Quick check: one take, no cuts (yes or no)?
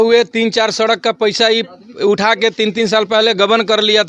yes